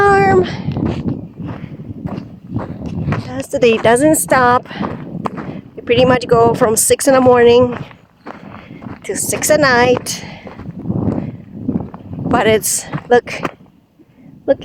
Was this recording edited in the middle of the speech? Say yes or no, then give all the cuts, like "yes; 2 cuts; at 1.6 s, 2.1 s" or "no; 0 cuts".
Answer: no; 0 cuts